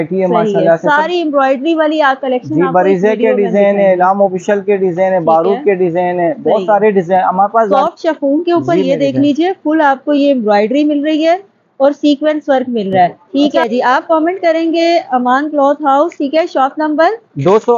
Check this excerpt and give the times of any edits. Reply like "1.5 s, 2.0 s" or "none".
7.8 s, 13.2 s